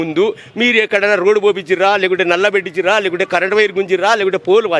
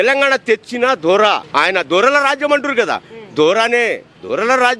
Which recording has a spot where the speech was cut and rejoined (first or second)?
second